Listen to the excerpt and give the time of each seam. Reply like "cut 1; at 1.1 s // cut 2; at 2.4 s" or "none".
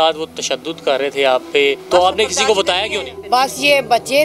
cut 1; at 1.8 s // cut 2; at 3.1 s